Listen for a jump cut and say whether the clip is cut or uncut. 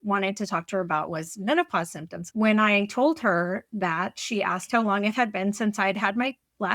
cut